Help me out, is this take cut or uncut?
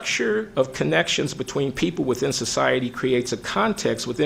uncut